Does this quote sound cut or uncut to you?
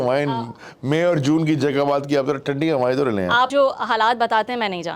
cut